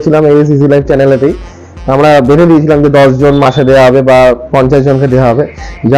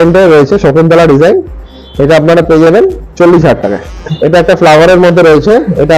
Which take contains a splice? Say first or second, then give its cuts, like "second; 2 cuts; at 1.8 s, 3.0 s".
second; 1 cut; at 4.0 s